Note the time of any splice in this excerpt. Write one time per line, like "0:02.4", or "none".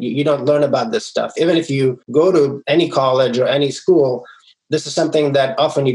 0:01.7
0:02.6

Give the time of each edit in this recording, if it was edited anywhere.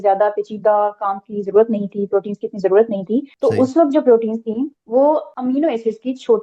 0:03.3
0:04.8
0:05.3

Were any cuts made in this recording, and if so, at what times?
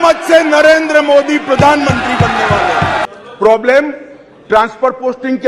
0:03.0

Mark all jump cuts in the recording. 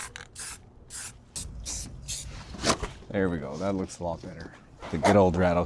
0:01.4
0:04.8

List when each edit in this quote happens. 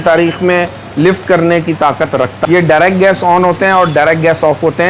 0:02.4

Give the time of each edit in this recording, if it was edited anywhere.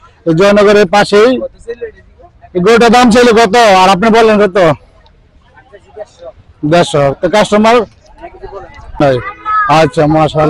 0:09.0

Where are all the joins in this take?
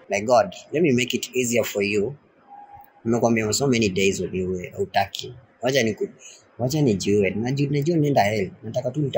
none

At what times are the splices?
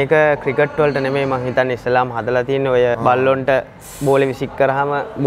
0:02.9

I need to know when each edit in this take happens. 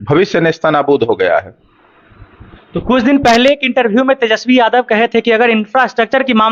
none

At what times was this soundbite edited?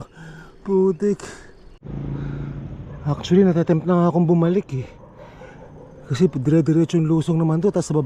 0:01.8

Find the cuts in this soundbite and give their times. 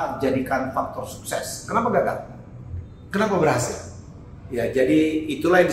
none

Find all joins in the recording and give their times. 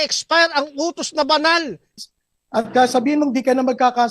0:01.9

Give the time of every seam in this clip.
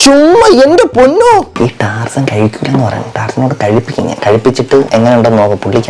0:01.5

